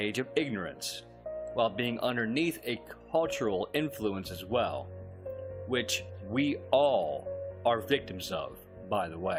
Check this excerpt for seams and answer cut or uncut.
uncut